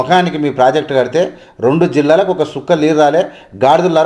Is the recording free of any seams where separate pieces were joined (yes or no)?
yes